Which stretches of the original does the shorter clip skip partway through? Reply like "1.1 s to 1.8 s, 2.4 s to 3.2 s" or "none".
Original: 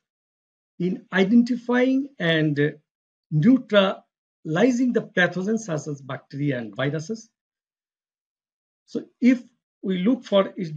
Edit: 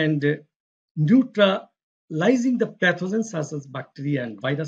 none